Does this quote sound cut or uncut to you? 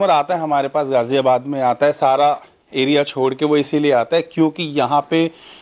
uncut